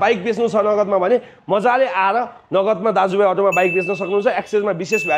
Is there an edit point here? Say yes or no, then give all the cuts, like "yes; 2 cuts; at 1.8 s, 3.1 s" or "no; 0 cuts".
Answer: no; 0 cuts